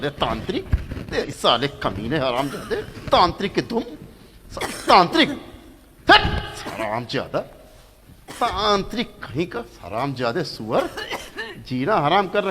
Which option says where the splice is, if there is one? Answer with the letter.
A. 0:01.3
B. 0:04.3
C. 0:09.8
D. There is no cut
A